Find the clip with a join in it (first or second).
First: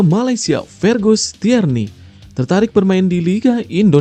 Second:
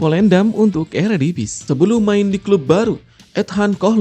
second